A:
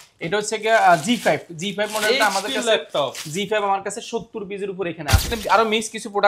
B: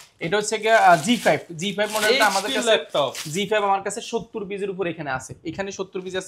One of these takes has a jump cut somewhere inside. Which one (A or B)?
A